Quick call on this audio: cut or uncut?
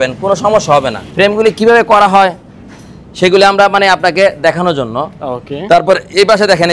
cut